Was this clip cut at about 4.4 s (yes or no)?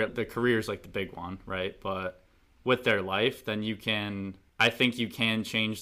yes